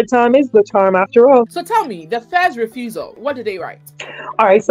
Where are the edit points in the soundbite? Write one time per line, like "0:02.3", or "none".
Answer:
0:01.6